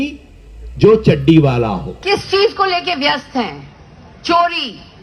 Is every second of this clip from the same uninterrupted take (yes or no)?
no